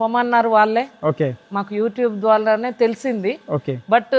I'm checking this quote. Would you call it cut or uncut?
uncut